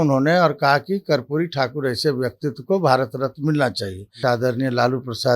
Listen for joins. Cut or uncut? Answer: cut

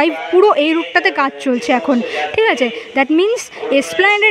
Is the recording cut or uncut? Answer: uncut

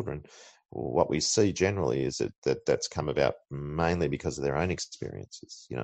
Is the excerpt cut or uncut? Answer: uncut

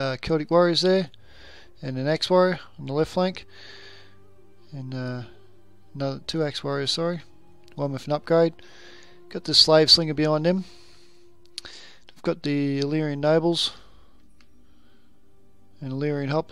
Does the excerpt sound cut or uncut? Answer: cut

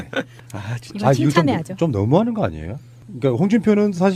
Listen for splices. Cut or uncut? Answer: uncut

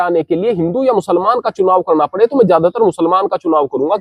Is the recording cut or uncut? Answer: uncut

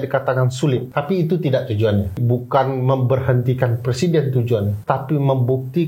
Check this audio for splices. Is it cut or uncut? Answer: cut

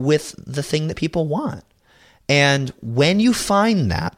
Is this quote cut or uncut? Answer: cut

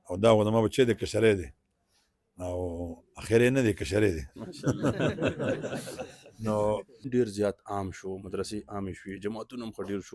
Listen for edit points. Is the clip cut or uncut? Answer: cut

